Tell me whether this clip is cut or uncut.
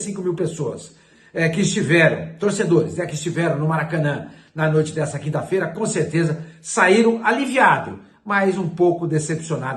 uncut